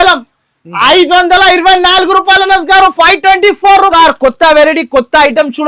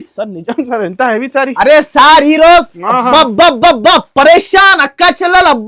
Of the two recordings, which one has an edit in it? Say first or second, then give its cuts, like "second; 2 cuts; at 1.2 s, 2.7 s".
first; 1 cut; at 3.9 s